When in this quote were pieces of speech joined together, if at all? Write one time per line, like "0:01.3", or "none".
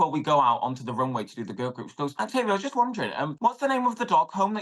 0:02.1
0:03.3